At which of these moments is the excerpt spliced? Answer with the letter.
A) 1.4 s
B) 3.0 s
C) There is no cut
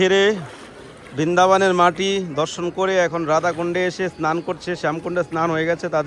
C